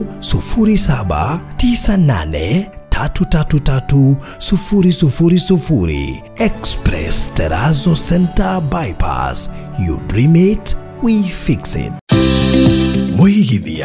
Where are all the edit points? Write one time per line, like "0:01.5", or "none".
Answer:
0:12.0

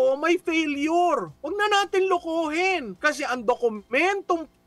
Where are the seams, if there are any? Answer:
0:01.4
0:02.9

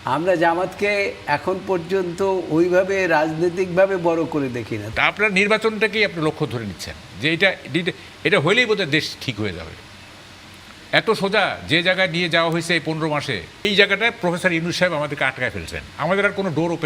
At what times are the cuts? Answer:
0:04.8
0:13.7

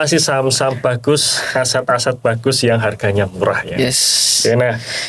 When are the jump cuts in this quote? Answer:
none

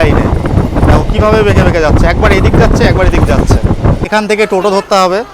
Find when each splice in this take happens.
0:04.0

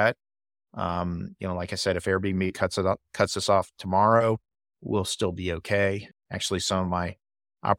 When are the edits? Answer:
0:06.1

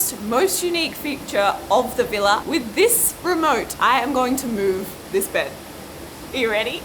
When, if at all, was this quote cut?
0:02.4
0:03.7

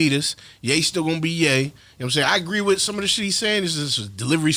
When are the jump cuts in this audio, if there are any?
none

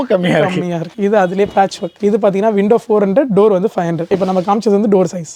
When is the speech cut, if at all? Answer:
none

